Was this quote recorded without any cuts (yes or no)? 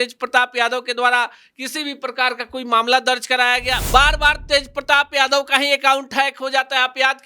no